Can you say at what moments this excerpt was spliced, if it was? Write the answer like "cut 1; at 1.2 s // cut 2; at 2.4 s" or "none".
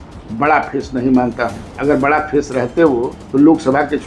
cut 1; at 1.7 s // cut 2; at 3.2 s